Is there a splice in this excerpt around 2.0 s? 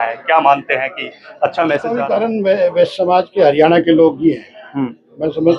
yes; 1 cut; at 2.0 s

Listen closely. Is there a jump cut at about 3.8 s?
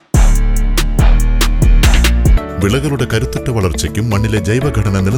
no; 1 cut; at 2.4 s

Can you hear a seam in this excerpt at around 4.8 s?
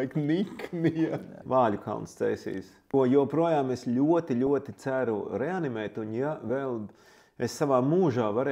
no; 2 cuts; at 1.4 s, 2.7 s

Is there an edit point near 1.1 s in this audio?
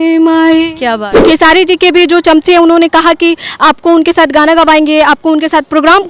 yes; 1 cut; at 1.1 s

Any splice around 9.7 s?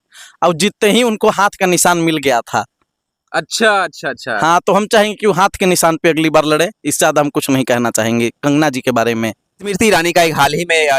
yes; 1 cut; at 9.7 s

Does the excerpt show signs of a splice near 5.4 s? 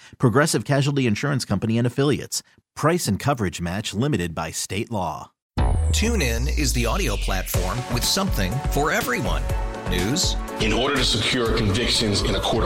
yes; 1 cut; at 5.4 s

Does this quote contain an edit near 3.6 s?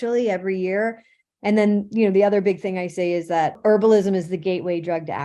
yes; 1 cut; at 3.6 s

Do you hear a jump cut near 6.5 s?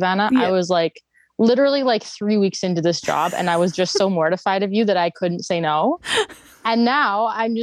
yes; 1 cut; at 6.5 s

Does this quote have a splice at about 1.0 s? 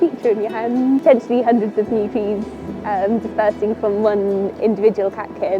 yes; 1 cut; at 1.0 s

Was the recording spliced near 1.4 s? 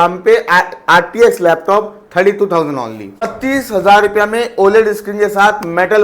no; 1 cut; at 3.3 s

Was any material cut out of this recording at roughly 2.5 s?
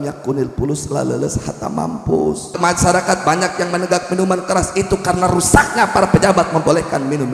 yes; 1 cut; at 2.5 s

